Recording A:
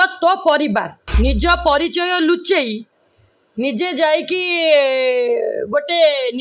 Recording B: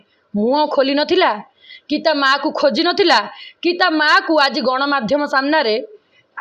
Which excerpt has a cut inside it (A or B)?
A